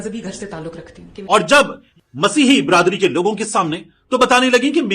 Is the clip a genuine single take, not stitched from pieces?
no; 2 cuts; at 1.1 s, 1.8 s

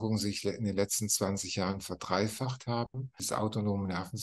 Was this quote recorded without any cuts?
no; 1 cut; at 3.2 s

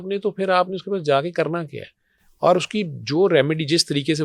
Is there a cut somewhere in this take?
no; 0 cuts

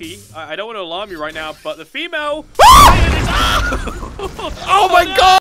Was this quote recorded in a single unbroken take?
yes; 0 cuts

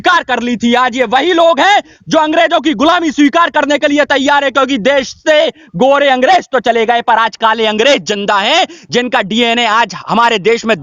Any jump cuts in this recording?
no; 0 cuts

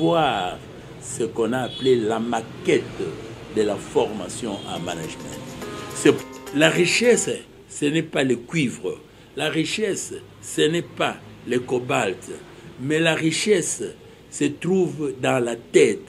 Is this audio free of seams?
no; 1 cut; at 6.2 s

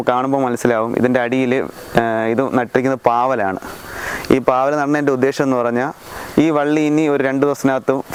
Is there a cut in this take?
no; 0 cuts

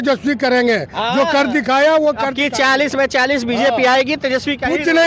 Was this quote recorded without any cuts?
yes; 0 cuts

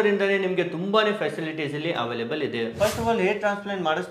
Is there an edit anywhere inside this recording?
yes; 1 cut; at 2.7 s

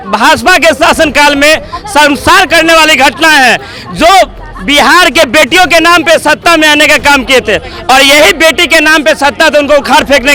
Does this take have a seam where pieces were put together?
no; 0 cuts

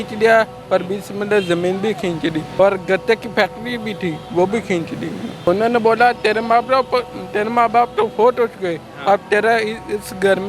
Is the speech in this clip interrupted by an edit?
yes; 2 cuts; at 2.4 s, 5.5 s

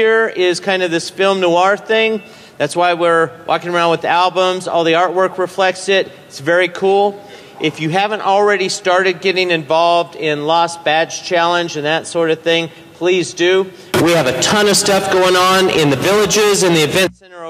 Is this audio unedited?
yes; 0 cuts

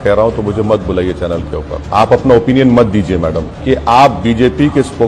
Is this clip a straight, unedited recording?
no; 2 cuts; at 1.8 s, 3.5 s

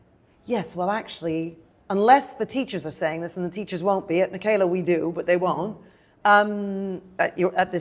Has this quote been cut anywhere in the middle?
no; 0 cuts

